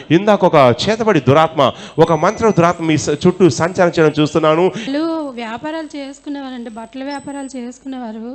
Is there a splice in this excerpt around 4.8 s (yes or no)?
yes